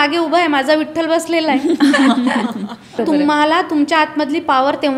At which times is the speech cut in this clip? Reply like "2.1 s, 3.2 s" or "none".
3.0 s